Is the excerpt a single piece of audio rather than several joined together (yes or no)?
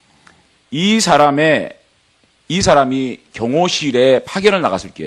no